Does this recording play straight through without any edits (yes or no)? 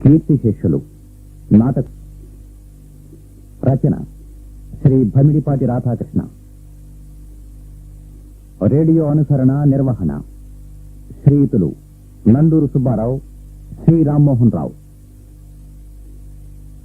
no